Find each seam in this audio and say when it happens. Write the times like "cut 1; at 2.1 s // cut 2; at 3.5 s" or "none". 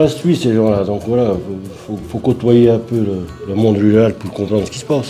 none